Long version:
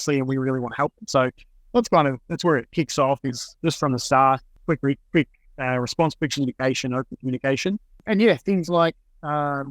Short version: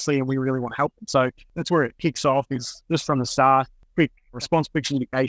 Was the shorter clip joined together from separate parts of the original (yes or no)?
yes